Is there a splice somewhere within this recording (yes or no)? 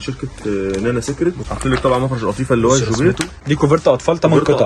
yes